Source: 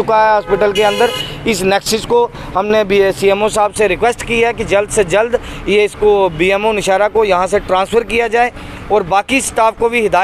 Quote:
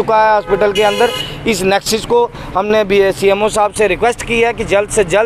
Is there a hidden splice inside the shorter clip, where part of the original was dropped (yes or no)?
no